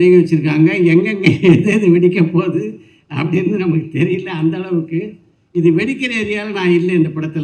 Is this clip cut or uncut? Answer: uncut